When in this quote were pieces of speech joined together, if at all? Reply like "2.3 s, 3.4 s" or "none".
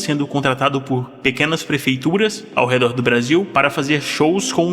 2.4 s, 3.5 s